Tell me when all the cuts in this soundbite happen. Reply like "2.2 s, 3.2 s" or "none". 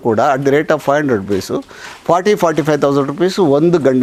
none